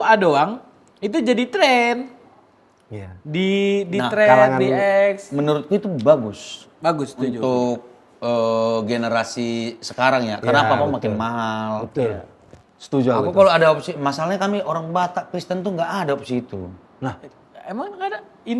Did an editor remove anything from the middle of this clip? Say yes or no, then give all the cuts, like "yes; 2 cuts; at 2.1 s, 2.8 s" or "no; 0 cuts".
no; 0 cuts